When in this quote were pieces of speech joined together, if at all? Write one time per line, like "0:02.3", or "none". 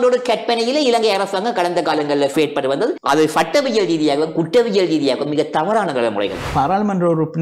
0:02.4
0:06.5